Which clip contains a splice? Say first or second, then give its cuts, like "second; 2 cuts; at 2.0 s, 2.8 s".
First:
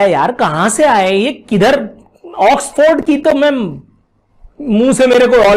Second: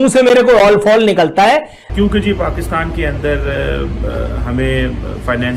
second; 1 cut; at 1.8 s